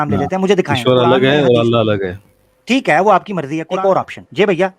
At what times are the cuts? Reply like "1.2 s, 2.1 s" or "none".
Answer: 3.7 s

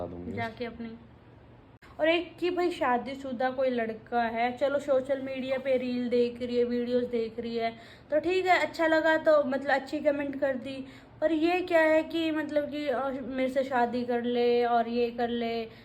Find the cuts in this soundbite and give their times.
1.7 s

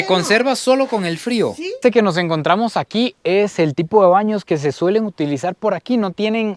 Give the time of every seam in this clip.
1.8 s

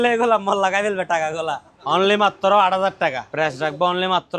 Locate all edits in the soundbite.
1.7 s, 3.2 s

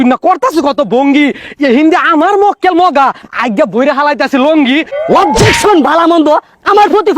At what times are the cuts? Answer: 4.9 s

